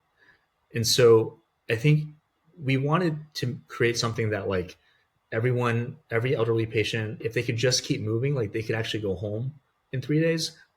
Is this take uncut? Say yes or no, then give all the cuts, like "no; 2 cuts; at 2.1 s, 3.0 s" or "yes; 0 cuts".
no; 1 cut; at 7.2 s